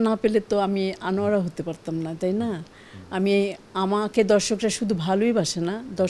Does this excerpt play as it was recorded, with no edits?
yes; 0 cuts

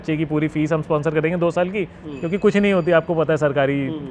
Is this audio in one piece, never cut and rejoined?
yes; 0 cuts

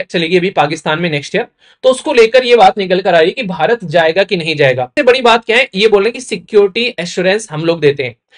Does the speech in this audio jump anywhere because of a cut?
yes; 1 cut; at 4.9 s

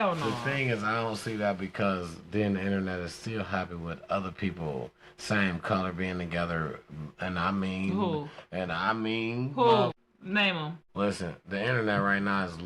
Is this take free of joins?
yes; 0 cuts

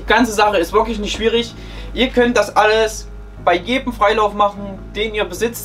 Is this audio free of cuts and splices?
yes; 0 cuts

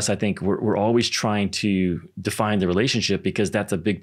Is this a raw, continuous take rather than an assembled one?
yes; 0 cuts

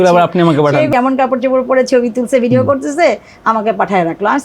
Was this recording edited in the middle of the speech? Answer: yes; 1 cut; at 0.9 s

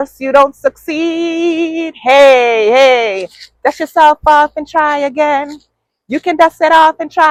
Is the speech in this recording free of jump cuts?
yes; 0 cuts

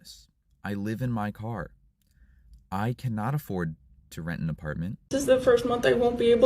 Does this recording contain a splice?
yes; 1 cut; at 5.0 s

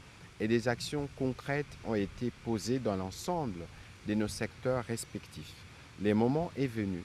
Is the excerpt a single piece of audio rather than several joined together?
no; 1 cut; at 6.1 s

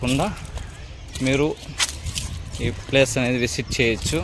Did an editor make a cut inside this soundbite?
no; 0 cuts

